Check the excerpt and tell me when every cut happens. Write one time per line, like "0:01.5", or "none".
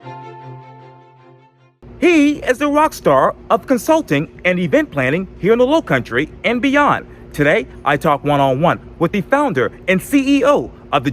0:01.8